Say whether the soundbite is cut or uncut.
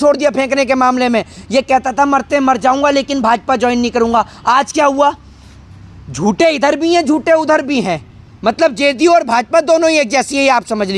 uncut